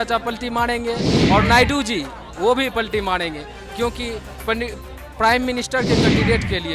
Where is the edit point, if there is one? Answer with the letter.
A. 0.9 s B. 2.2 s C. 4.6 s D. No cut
D